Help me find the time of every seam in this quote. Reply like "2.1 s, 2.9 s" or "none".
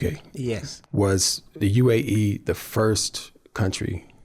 0.9 s